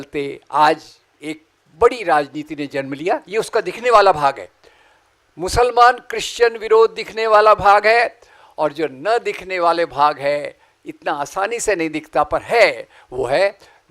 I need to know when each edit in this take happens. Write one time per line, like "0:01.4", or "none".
none